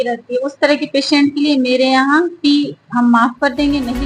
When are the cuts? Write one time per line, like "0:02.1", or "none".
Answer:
none